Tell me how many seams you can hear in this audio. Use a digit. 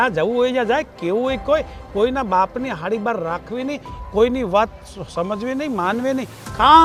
0